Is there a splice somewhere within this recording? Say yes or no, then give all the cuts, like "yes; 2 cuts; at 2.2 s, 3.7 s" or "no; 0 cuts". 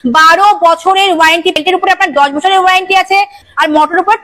yes; 2 cuts; at 1.5 s, 3.4 s